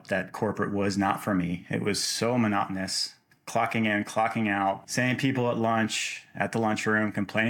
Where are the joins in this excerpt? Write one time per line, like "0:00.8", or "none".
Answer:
0:04.9